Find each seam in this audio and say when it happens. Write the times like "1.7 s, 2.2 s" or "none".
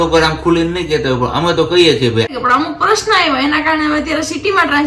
2.4 s